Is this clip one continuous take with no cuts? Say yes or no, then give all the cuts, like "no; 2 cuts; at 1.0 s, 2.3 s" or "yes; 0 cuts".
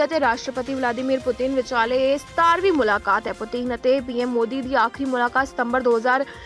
yes; 0 cuts